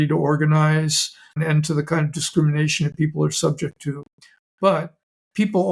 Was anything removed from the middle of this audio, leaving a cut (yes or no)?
yes